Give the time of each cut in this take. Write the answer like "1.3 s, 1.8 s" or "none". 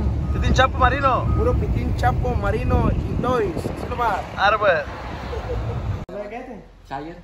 6.1 s

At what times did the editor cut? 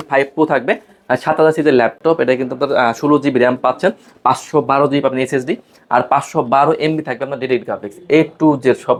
none

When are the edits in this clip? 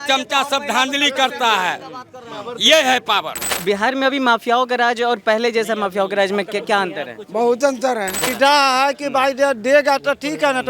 3.5 s, 8.2 s

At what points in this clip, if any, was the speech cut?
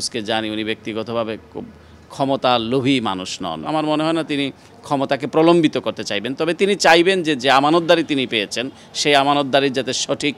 3.7 s

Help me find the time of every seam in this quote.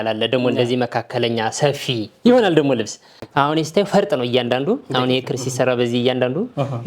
3.1 s

